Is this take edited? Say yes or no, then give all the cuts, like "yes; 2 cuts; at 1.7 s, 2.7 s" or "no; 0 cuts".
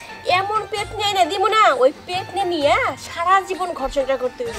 no; 0 cuts